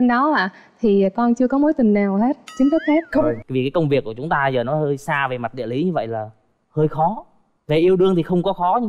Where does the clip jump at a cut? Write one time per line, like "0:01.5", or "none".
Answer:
0:03.4

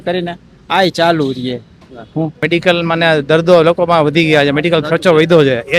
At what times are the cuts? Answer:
0:02.4

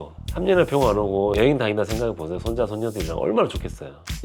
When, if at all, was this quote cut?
none

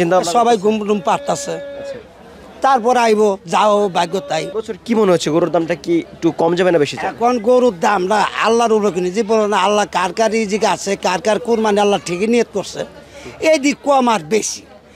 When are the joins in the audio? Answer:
0:04.5

